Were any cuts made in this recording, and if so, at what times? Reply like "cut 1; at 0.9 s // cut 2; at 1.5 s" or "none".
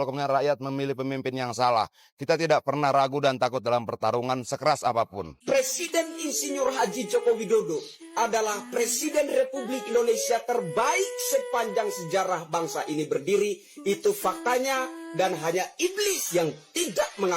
cut 1; at 5.3 s